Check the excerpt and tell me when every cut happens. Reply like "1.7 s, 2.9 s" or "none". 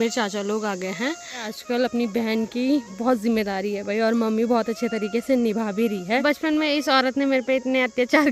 1.5 s, 6.2 s